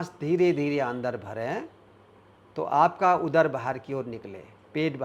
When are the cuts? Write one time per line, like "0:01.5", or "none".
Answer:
none

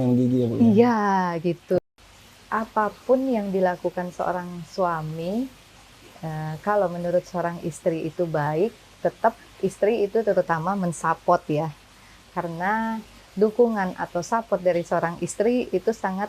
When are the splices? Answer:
0:01.8

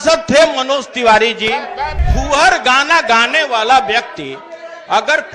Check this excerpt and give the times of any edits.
0:02.0

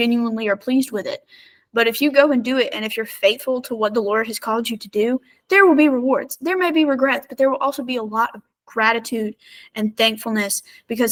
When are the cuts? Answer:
none

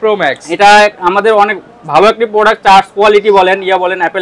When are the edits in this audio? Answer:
none

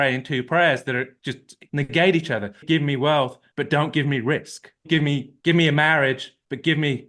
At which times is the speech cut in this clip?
none

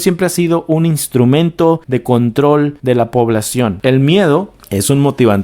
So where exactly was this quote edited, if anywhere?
0:03.7

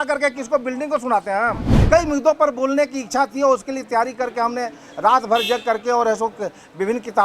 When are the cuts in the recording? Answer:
0:01.7

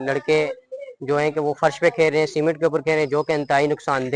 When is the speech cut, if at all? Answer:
none

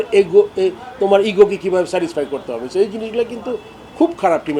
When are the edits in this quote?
none

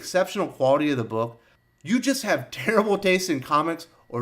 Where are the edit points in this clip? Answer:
0:01.5

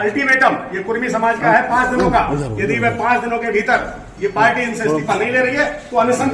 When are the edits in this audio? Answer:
none

